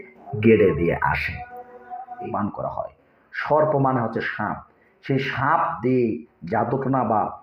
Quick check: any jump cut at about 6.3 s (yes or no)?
no